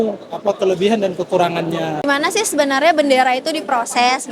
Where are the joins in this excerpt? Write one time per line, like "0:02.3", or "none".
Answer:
0:02.0